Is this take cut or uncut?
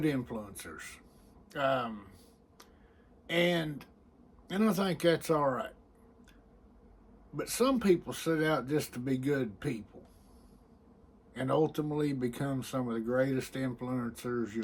uncut